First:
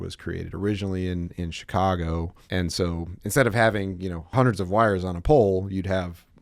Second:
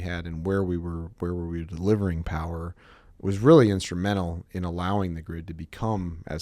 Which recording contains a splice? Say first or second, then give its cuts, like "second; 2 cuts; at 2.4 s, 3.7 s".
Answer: first; 2 cuts; at 2.4 s, 4.2 s